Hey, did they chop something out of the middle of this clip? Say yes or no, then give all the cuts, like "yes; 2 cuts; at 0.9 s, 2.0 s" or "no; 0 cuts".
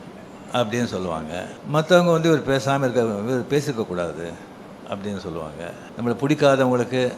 yes; 2 cuts; at 1.6 s, 5.9 s